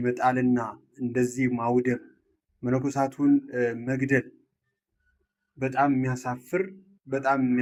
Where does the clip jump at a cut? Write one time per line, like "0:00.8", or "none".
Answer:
none